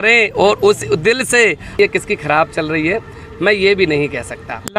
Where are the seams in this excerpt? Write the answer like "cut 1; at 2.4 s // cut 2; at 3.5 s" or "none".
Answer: cut 1; at 1.8 s